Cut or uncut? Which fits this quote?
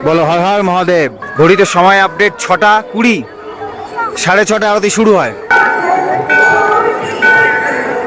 cut